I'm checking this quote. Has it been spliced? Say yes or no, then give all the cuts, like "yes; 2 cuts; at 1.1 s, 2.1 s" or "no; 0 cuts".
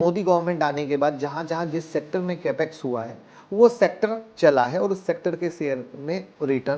no; 0 cuts